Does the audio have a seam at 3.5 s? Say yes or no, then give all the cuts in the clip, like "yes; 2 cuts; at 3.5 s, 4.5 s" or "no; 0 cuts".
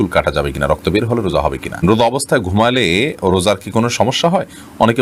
no; 1 cut; at 1.8 s